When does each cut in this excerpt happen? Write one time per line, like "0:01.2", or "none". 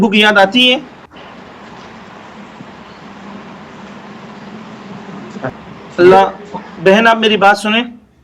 0:01.0
0:05.5

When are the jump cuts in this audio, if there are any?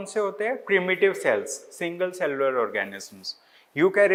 none

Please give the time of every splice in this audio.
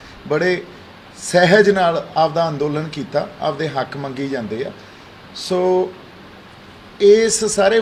none

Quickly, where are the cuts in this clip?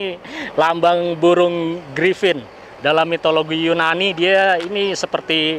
none

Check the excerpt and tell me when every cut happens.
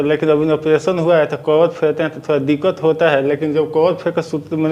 none

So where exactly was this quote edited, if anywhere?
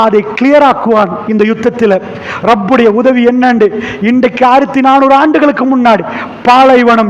0:05.5

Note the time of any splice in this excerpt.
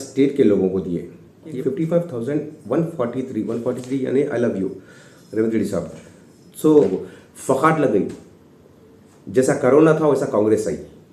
0:01.4
0:06.9

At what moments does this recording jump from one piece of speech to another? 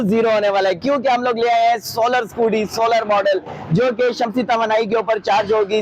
none

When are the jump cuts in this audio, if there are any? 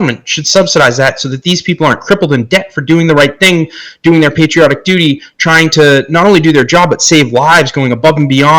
none

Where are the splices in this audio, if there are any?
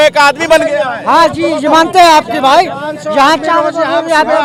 none

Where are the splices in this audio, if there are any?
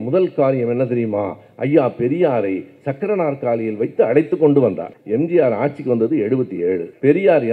none

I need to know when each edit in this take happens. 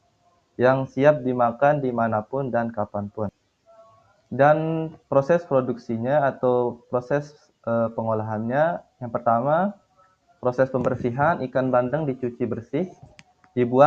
none

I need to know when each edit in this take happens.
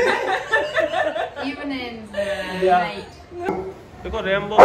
0:03.5

